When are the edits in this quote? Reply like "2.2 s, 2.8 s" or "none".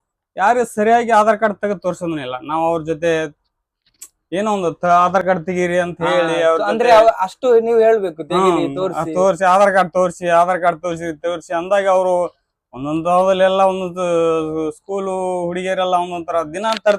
none

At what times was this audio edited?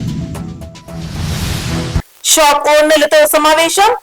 none

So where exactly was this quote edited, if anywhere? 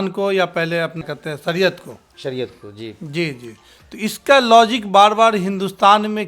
1.0 s

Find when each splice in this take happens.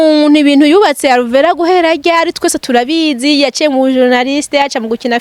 none

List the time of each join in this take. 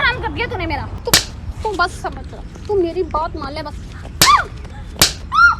0.9 s

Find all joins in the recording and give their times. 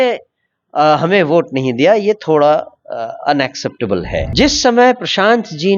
4.3 s

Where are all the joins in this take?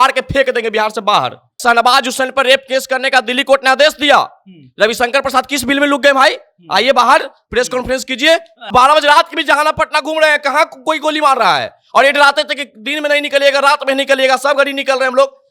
1.6 s, 8.7 s

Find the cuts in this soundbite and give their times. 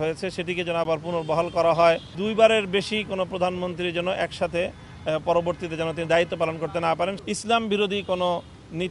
2.1 s, 7.2 s

